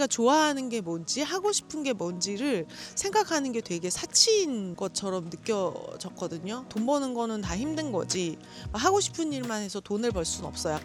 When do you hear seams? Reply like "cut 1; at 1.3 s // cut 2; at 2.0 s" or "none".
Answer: none